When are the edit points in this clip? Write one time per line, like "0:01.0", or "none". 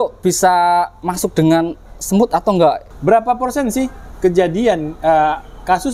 0:02.9

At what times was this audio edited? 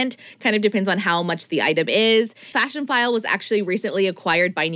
0:02.5

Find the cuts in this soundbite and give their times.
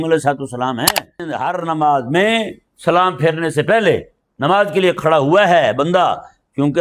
0:01.3

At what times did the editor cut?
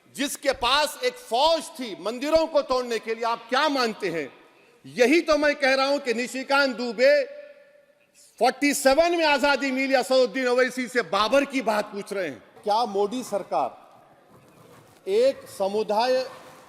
0:12.5

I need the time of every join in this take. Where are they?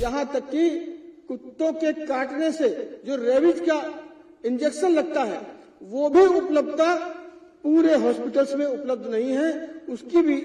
none

